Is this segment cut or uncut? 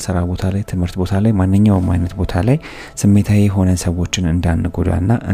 uncut